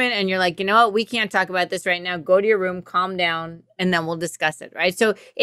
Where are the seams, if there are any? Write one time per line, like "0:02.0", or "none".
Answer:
none